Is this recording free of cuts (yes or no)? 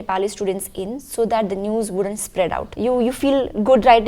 no